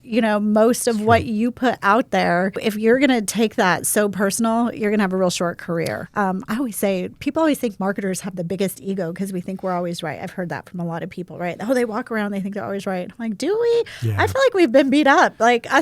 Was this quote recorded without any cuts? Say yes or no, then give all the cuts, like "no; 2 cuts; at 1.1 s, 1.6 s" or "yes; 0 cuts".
no; 2 cuts; at 2.6 s, 6.0 s